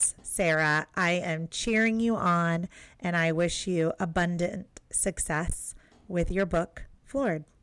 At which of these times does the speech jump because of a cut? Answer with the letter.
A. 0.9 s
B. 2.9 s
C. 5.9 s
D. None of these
D